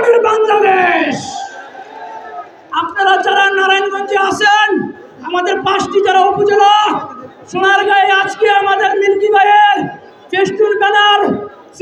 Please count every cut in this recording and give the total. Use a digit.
0